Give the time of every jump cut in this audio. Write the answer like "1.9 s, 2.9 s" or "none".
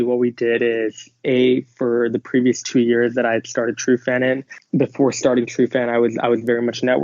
4.5 s